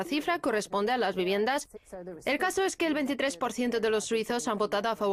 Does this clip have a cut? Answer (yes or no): no